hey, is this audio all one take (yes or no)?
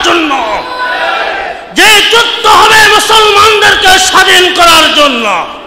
yes